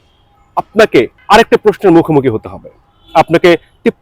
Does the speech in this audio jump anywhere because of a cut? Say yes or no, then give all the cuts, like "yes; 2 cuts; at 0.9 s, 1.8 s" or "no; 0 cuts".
yes; 1 cut; at 1.2 s